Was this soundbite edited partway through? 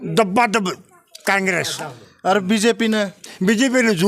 no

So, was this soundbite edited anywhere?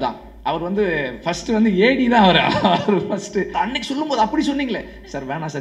yes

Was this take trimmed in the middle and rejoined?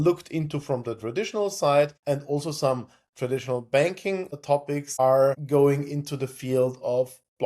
no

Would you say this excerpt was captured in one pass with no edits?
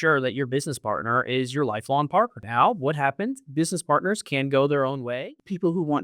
no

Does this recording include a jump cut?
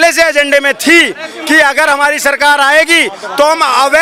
no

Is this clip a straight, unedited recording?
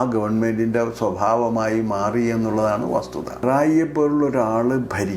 no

